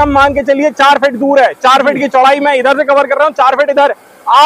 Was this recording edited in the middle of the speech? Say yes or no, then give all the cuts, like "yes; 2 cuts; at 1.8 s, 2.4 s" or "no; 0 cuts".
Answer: no; 0 cuts